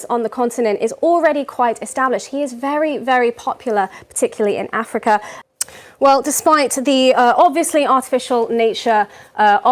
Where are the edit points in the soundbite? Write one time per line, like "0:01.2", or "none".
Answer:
0:05.3